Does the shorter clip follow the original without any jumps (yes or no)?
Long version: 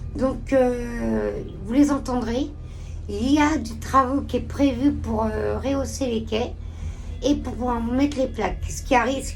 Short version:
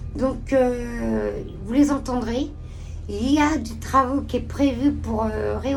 yes